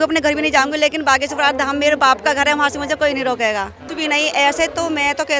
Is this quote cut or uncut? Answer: cut